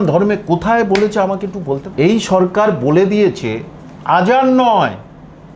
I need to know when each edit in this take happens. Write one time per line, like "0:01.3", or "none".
0:01.9